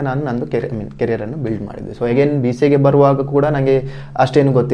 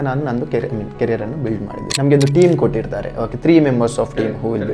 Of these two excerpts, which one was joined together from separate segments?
second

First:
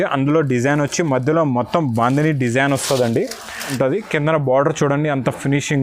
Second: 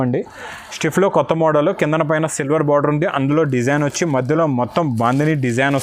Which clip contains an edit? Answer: first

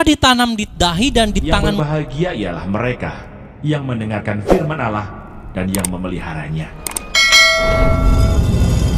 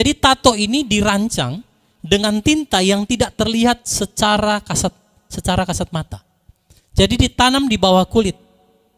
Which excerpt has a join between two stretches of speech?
first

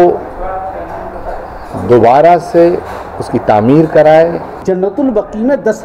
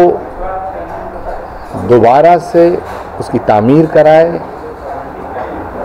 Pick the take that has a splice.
first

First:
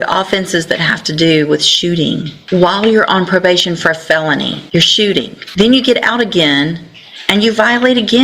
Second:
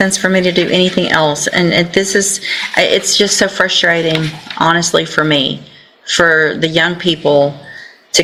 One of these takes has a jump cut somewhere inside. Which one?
first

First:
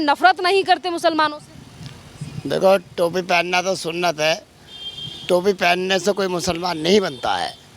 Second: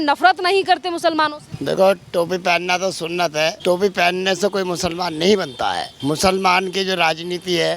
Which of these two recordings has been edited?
second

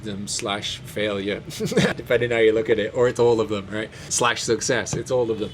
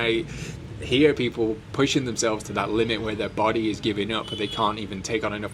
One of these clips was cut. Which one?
first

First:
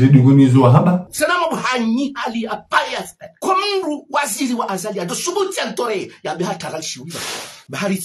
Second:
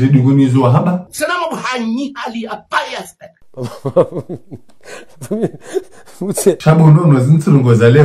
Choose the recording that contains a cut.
second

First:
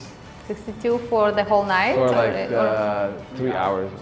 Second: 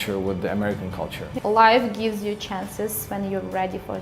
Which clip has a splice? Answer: second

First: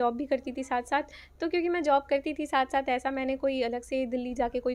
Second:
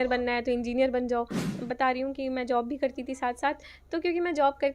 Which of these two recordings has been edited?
second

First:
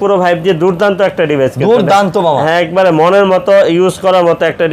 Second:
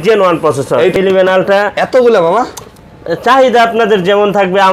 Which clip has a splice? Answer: second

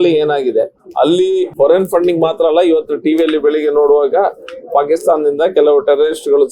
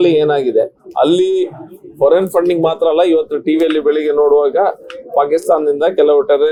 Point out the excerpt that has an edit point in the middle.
first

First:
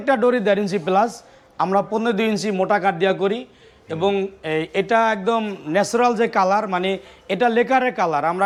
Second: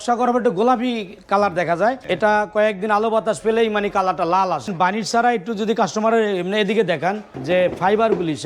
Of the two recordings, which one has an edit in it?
second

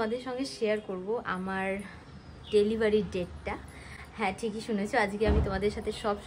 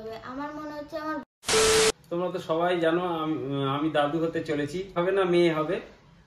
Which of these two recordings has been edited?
second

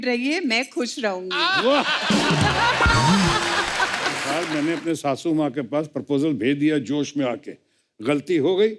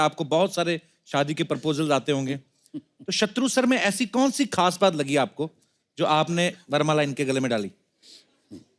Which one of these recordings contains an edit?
first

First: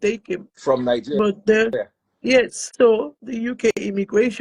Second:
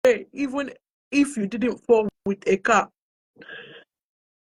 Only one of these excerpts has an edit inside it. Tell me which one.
first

